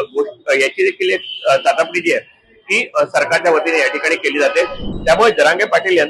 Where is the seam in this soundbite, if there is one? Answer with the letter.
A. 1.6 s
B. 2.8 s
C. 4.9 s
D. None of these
C